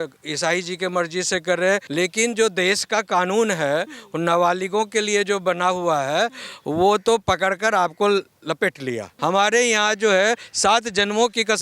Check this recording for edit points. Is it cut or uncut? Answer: cut